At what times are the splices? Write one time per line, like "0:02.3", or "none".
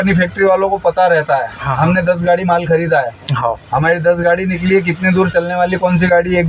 none